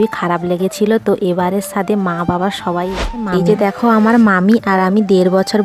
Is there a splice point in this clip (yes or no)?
yes